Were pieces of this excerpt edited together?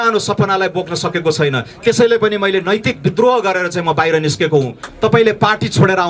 yes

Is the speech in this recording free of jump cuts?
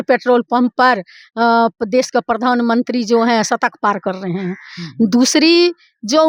yes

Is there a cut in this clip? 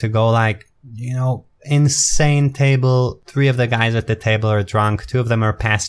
yes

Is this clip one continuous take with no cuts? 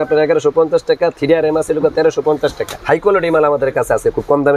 no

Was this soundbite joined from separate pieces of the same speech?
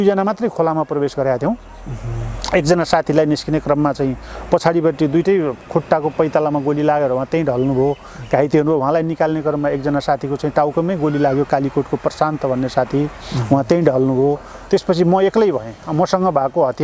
no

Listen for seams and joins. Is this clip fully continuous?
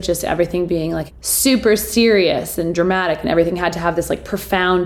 no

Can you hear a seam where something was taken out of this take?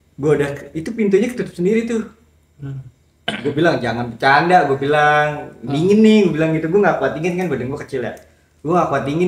no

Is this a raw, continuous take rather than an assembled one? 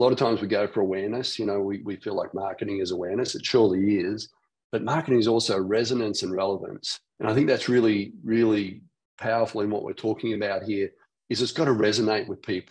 no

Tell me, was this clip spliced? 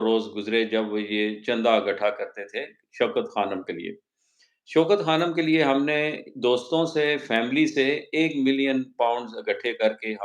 no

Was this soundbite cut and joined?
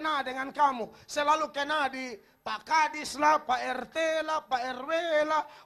no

